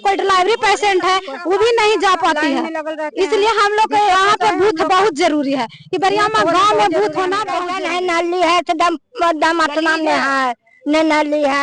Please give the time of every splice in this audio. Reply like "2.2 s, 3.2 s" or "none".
7.6 s